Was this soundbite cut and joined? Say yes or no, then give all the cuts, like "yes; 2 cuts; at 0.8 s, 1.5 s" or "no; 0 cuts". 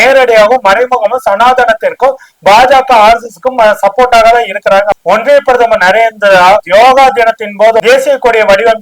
yes; 1 cut; at 4.9 s